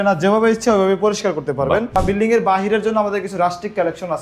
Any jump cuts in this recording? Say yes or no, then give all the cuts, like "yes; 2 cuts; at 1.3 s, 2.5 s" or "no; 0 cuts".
yes; 1 cut; at 2.0 s